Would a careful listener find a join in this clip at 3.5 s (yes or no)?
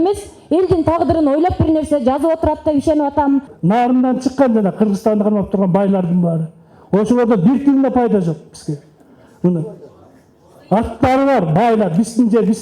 yes